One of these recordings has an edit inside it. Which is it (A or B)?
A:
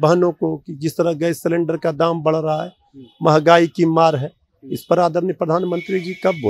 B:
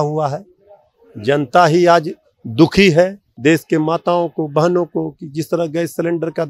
B